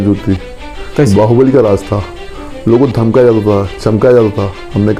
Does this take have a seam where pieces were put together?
no; 0 cuts

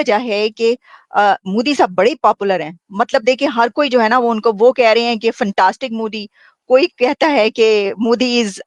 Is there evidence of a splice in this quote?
no; 0 cuts

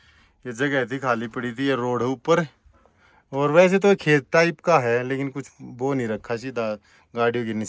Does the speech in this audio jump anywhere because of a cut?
no; 0 cuts

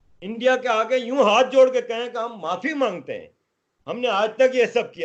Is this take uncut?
yes; 0 cuts

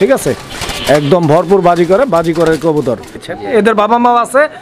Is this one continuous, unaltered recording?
no; 1 cut; at 3.2 s

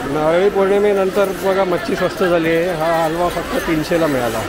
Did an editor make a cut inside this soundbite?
no; 0 cuts

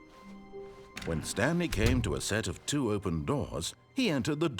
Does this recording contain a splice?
yes; 1 cut; at 1.1 s

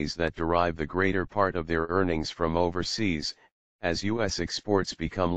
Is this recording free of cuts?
yes; 0 cuts

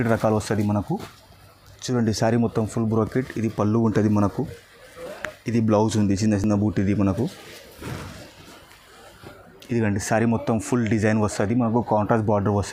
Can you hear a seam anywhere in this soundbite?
no; 0 cuts

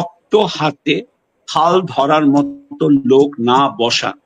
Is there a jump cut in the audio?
no; 0 cuts

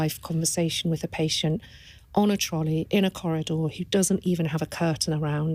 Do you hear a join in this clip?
no; 0 cuts

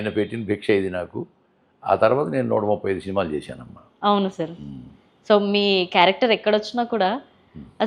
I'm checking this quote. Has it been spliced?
no; 0 cuts

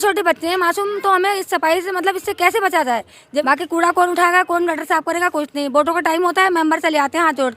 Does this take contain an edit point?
yes; 1 cut; at 3.4 s

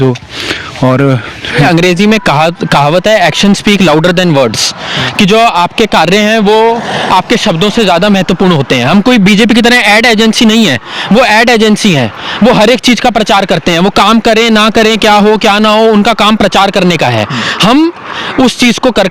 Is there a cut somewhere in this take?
yes; 1 cut; at 1.5 s

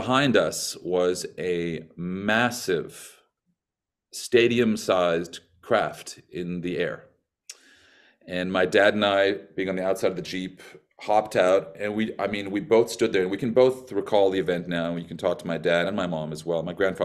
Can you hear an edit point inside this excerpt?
no; 0 cuts

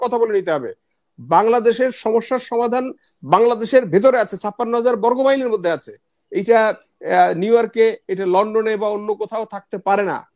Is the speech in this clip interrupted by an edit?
no; 0 cuts

